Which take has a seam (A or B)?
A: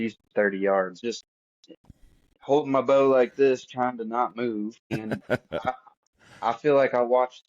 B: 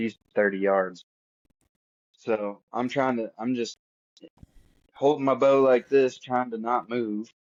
A